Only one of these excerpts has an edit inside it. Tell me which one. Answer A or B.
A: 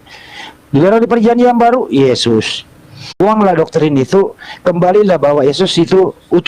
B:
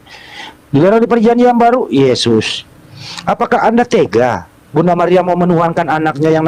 A